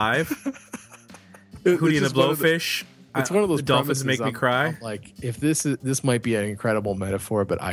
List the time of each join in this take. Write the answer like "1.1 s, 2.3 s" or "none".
1.6 s